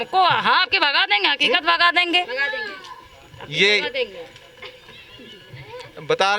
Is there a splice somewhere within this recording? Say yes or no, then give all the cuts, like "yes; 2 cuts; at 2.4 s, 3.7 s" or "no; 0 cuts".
no; 0 cuts